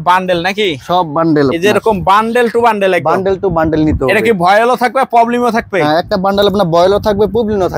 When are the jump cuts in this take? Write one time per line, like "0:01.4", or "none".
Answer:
none

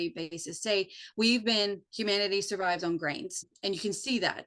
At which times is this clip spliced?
0:03.5

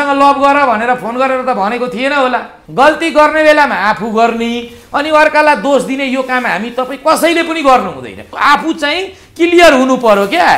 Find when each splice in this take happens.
0:02.6
0:08.3

